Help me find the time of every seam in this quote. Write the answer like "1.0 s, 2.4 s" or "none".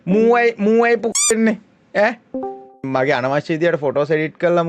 2.8 s